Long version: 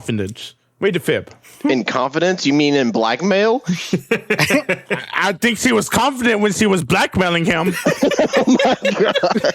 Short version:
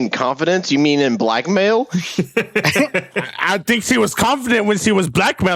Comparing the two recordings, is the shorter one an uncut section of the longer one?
yes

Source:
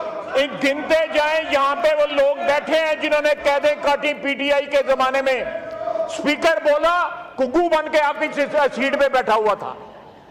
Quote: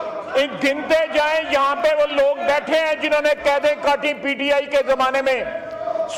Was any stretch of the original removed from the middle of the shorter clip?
no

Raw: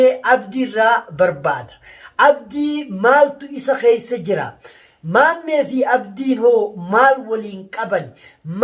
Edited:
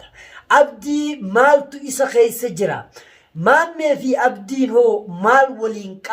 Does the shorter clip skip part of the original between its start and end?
no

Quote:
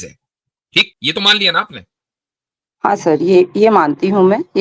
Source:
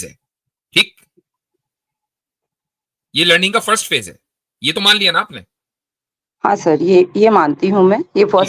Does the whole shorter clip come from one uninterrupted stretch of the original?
no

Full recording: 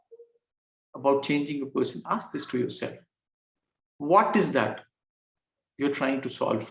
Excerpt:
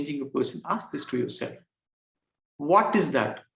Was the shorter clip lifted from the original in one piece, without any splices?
yes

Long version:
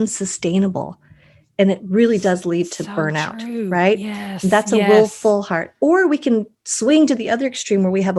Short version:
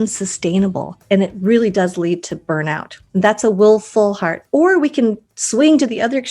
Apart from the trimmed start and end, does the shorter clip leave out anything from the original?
yes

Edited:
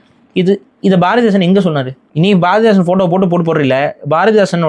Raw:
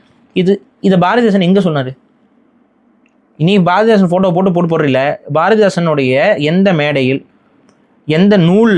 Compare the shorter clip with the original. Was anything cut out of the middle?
yes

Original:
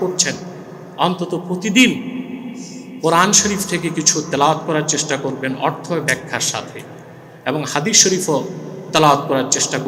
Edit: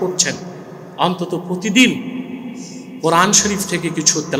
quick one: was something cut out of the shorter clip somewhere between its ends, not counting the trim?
no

